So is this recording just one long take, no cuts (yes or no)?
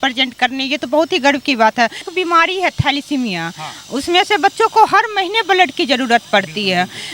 no